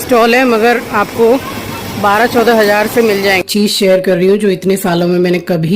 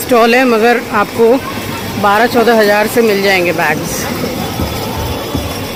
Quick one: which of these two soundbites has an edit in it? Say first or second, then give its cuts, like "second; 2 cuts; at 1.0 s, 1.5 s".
first; 1 cut; at 3.4 s